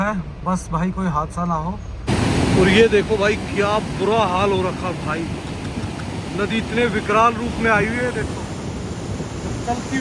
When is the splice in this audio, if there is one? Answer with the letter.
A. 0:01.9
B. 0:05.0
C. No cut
A